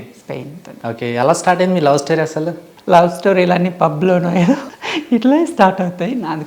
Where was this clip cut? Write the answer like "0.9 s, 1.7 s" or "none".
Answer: 2.7 s, 4.7 s

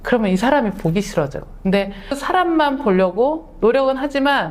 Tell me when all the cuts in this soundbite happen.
1.8 s

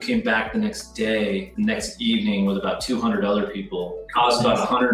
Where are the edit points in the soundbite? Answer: 1.5 s, 4.1 s

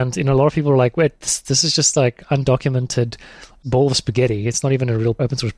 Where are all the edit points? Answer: none

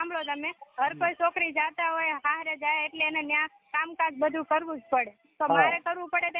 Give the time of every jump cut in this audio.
none

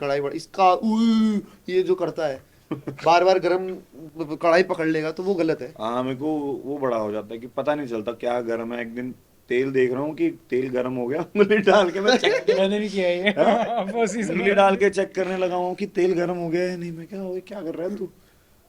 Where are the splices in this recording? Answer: none

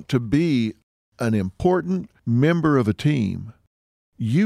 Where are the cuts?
2.1 s

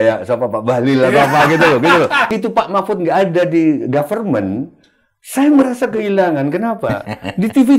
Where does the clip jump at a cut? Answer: 2.3 s

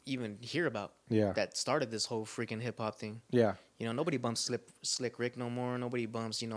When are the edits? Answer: none

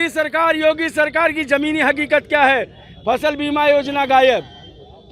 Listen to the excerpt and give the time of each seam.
none

